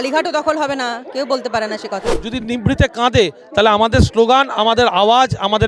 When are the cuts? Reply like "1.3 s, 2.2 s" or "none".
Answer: 2.2 s